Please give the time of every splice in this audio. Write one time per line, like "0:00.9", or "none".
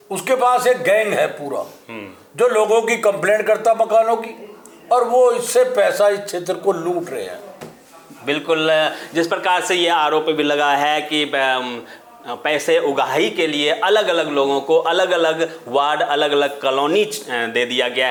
none

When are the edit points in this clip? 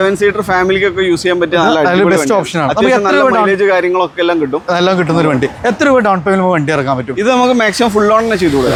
none

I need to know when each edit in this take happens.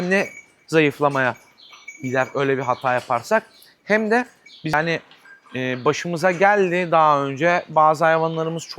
0:04.7

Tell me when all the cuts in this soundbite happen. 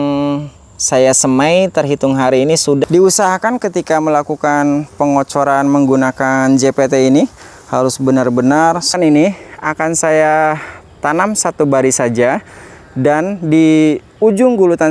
0:02.8
0:09.0

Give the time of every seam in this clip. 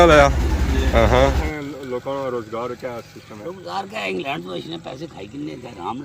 0:01.5

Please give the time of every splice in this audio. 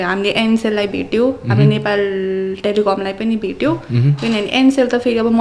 none

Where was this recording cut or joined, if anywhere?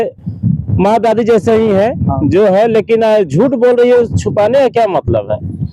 none

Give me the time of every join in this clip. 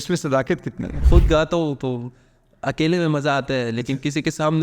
0:00.9

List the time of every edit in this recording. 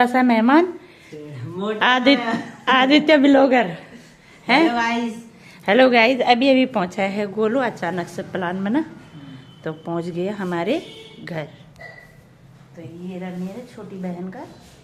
none

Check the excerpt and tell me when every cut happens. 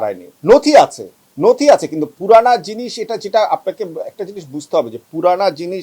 none

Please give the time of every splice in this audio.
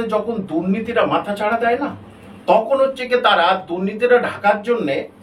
none

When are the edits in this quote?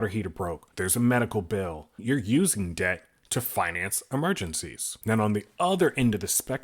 0:01.9

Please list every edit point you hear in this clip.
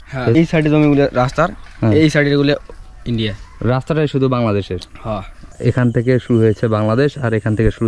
0:05.4

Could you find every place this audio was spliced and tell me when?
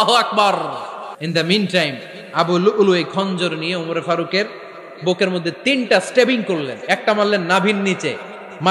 0:01.2

